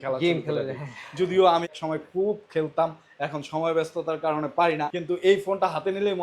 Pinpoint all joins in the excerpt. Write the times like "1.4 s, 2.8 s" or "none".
1.7 s, 4.9 s